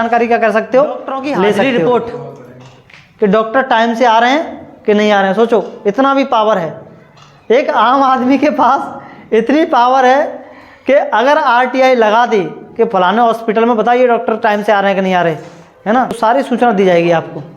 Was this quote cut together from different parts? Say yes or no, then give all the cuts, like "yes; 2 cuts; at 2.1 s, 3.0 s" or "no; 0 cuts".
yes; 2 cuts; at 1.6 s, 16.2 s